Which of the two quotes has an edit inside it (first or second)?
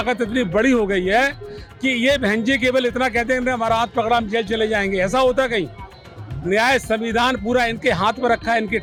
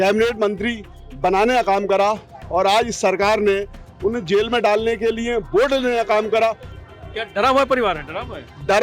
second